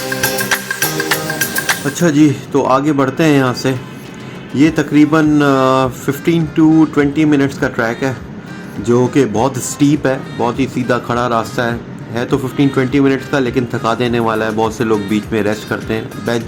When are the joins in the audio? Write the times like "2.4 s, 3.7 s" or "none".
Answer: 1.8 s